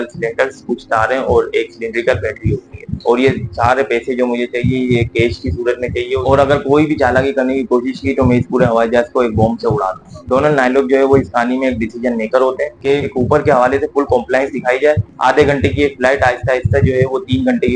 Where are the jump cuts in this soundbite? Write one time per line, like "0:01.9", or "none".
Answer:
0:02.9
0:06.2
0:10.1
0:12.8
0:15.1